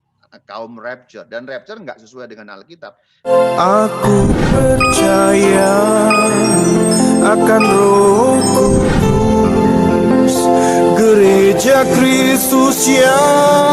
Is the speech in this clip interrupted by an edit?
yes; 1 cut; at 3.0 s

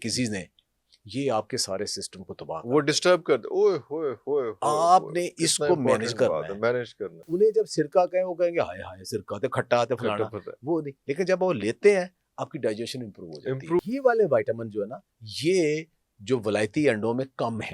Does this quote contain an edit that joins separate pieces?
yes; 2 cuts; at 7.2 s, 13.9 s

